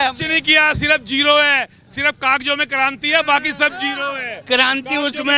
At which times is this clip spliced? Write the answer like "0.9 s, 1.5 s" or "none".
none